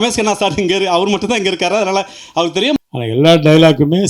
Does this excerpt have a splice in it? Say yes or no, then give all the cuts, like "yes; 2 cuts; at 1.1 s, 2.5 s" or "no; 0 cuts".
yes; 1 cut; at 2.8 s